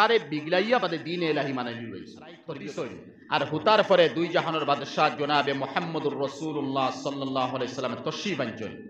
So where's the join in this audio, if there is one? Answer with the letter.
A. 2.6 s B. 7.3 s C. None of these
A